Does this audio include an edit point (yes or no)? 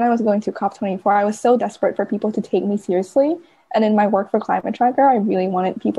no